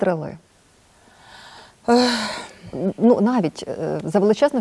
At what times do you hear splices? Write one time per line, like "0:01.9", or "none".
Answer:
none